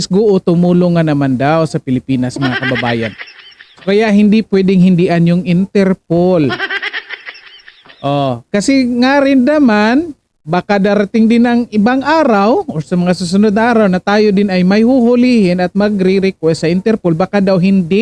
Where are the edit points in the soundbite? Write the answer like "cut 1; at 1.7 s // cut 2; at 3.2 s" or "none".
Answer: none